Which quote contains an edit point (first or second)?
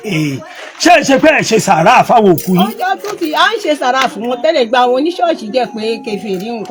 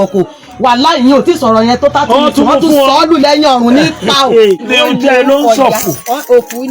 second